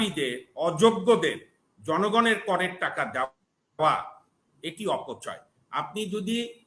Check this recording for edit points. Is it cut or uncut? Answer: uncut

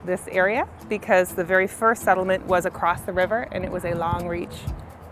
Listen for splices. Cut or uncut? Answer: uncut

